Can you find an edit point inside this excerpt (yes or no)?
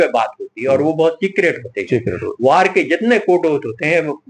no